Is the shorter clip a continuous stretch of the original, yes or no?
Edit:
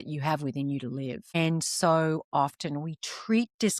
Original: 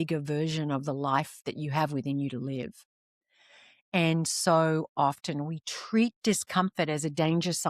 no